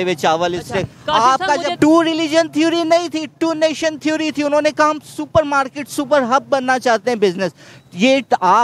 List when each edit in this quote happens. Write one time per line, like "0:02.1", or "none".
0:01.7